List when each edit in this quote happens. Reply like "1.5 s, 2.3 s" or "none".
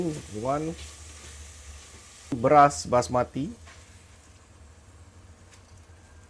2.4 s